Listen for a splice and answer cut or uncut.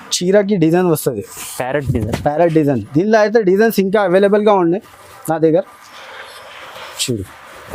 uncut